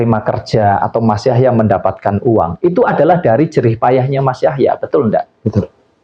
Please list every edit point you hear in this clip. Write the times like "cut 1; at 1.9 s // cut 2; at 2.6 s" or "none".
none